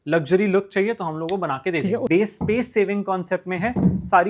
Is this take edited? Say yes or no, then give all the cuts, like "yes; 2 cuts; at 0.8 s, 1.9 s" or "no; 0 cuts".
yes; 1 cut; at 2.0 s